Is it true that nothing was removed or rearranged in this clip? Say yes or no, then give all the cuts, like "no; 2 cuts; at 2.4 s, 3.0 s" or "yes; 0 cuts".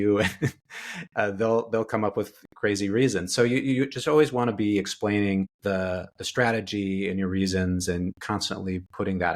no; 1 cut; at 8.2 s